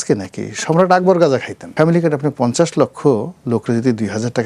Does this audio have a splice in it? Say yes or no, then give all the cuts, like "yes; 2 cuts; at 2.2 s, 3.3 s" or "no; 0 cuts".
yes; 1 cut; at 1.6 s